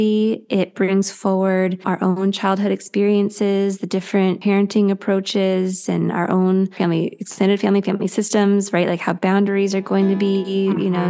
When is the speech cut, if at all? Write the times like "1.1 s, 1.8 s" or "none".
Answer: 1.8 s, 4.4 s, 6.8 s